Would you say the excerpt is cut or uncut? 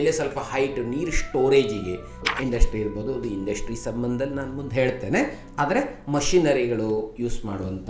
cut